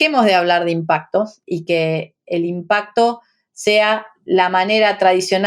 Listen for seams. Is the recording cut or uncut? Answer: cut